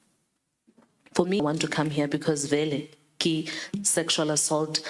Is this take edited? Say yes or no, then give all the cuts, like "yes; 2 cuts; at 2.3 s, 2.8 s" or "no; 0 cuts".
yes; 1 cut; at 1.4 s